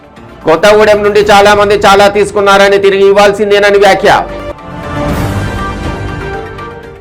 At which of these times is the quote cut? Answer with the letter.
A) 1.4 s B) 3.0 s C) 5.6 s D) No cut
D